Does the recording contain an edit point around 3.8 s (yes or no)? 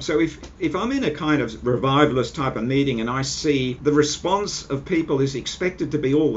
yes